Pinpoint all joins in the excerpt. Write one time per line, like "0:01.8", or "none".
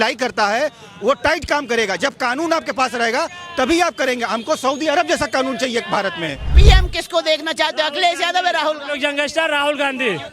0:06.5